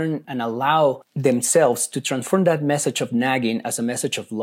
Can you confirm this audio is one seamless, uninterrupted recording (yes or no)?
no